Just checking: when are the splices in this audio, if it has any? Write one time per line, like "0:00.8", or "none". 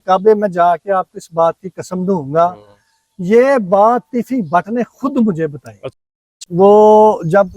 0:05.9